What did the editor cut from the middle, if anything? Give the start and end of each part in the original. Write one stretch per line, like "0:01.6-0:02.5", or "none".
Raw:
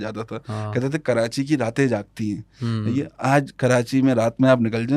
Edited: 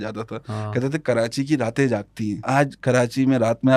0:02.4-0:03.1